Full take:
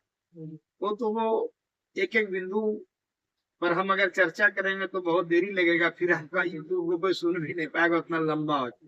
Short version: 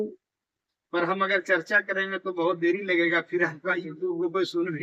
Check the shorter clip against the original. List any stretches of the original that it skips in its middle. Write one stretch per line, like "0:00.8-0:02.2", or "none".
none